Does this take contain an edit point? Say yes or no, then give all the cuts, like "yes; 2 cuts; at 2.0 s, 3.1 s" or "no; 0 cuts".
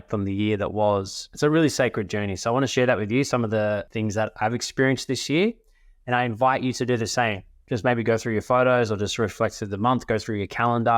yes; 2 cuts; at 1.2 s, 2.7 s